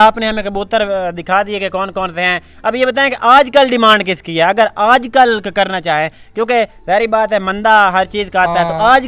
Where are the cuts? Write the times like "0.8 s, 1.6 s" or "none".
none